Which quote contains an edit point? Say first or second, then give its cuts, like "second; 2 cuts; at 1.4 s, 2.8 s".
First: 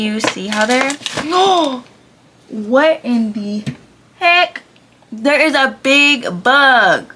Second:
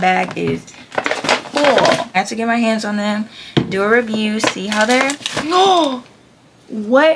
second; 1 cut; at 2.1 s